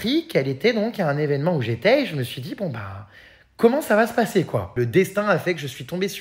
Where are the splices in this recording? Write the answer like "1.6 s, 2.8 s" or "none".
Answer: 4.7 s